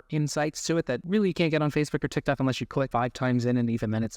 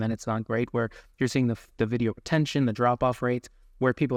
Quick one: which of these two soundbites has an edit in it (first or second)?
first